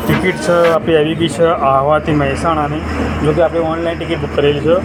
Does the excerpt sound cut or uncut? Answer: uncut